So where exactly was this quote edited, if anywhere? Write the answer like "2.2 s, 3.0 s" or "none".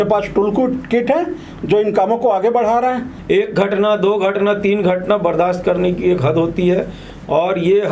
3.1 s